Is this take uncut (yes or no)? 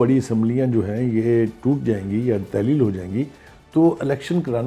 yes